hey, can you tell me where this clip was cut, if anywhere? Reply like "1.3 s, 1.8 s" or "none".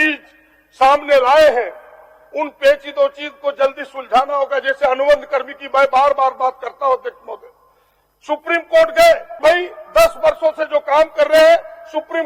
9.3 s

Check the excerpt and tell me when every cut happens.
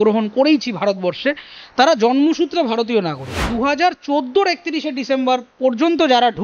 3.5 s

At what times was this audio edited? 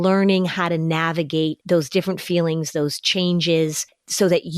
1.6 s

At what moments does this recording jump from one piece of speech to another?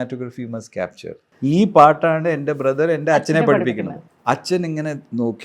1.3 s, 4.0 s

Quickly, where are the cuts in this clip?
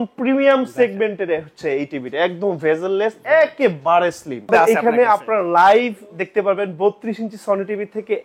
4.5 s

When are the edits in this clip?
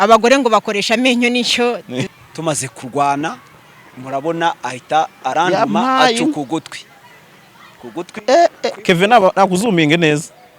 2.0 s

